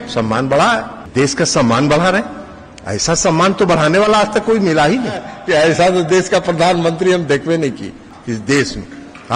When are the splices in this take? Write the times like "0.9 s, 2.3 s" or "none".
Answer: 1.0 s, 5.3 s, 8.1 s